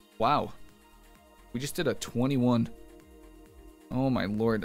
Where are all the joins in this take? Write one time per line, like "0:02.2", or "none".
none